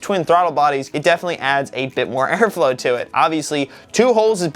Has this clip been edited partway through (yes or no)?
yes